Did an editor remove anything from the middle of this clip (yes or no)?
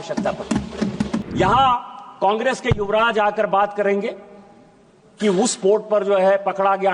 yes